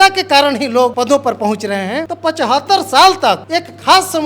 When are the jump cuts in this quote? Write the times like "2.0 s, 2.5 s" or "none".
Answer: 0.9 s, 2.1 s, 3.4 s